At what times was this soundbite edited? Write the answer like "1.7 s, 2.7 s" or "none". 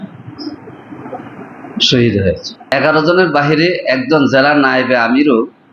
2.7 s